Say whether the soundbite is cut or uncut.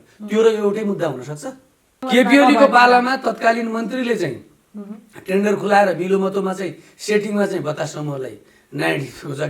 cut